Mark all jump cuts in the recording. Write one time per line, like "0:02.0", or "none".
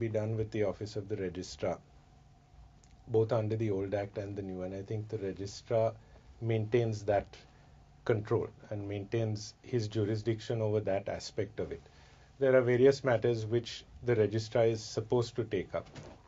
0:08.3